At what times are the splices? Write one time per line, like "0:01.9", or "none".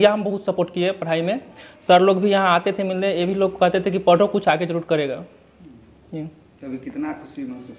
none